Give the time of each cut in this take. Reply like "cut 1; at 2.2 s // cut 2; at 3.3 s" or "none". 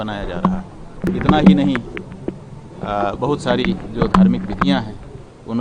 cut 1; at 1.0 s